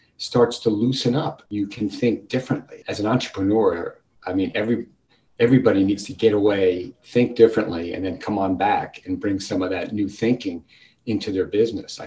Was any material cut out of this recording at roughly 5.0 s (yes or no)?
no